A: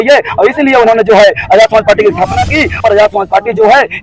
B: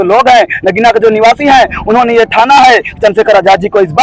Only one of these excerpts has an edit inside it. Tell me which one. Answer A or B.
A